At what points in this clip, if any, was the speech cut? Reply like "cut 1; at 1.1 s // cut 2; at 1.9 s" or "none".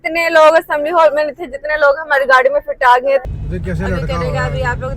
cut 1; at 3.2 s